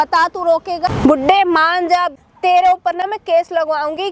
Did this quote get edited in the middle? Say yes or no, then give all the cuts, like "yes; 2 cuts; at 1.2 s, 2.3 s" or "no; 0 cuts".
yes; 2 cuts; at 0.9 s, 2.2 s